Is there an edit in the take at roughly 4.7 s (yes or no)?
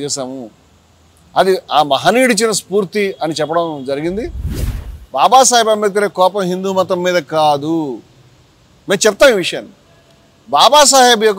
yes